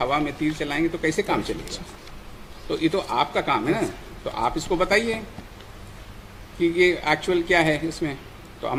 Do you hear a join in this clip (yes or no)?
no